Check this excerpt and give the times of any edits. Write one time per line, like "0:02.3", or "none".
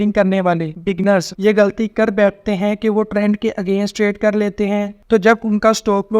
0:01.1